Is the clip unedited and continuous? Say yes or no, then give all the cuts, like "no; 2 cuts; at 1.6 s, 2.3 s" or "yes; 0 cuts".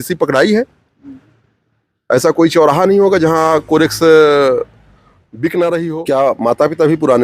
no; 1 cut; at 6.0 s